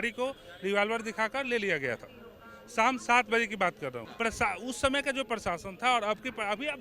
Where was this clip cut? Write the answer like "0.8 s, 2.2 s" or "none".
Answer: 4.0 s